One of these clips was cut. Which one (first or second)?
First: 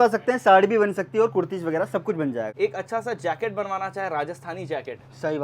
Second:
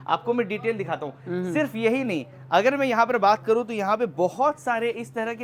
first